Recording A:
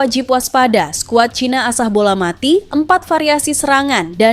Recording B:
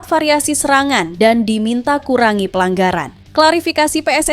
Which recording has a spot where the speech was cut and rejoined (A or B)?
B